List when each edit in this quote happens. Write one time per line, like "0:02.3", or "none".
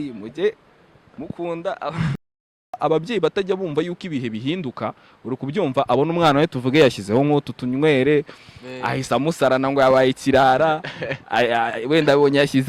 0:02.8

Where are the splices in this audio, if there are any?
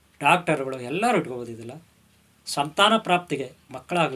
none

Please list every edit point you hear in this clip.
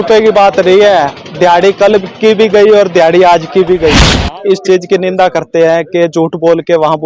0:04.1

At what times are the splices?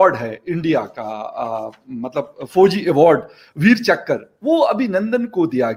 none

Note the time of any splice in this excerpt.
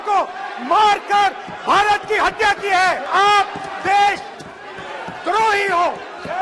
0:03.0

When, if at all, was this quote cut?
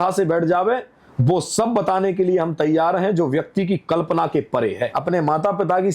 0:04.9

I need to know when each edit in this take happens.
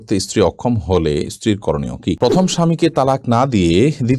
0:02.2

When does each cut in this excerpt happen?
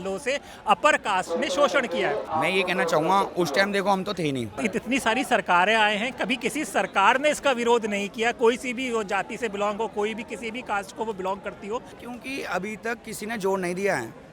0:02.3
0:04.6
0:11.9

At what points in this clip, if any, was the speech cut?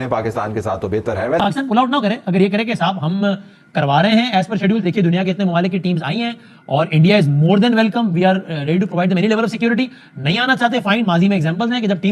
0:01.4

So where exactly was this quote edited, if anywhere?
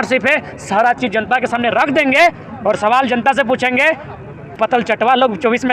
0:04.5

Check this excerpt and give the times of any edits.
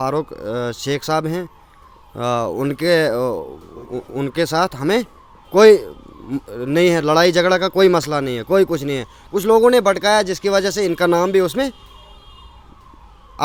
none

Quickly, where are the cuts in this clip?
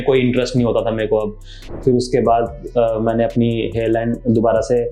0:01.6

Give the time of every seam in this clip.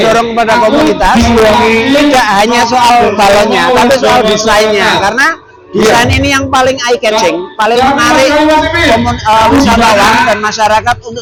none

